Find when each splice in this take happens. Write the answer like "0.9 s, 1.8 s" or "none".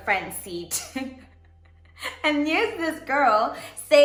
none